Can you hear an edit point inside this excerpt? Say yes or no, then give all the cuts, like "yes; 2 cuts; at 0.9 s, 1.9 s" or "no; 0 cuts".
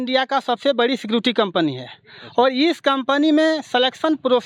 no; 0 cuts